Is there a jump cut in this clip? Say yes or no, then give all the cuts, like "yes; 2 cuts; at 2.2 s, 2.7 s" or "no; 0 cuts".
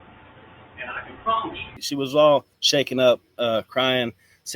yes; 2 cuts; at 1.9 s, 2.6 s